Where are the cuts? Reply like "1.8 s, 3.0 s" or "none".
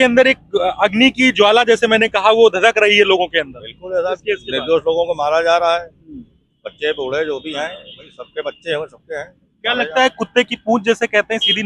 none